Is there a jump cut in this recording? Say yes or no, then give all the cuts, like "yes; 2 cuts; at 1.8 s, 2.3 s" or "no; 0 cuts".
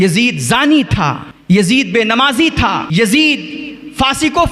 yes; 2 cuts; at 1.3 s, 2.9 s